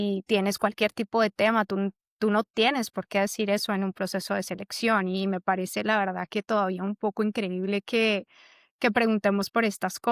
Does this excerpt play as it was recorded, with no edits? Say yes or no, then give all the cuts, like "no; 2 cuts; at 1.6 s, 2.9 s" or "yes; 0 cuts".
yes; 0 cuts